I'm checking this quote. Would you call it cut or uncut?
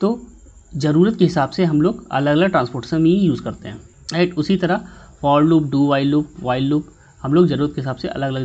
uncut